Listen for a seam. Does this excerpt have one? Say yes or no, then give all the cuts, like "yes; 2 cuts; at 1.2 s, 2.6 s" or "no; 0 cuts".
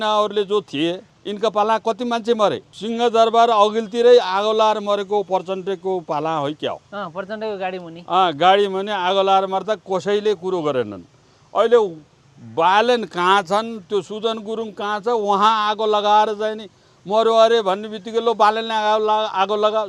no; 0 cuts